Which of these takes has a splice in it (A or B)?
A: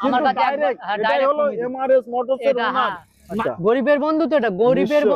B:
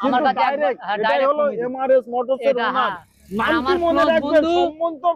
A